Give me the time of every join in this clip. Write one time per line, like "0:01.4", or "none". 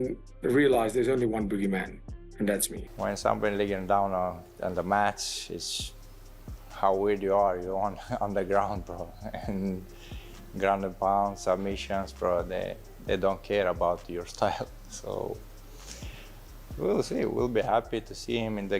0:02.8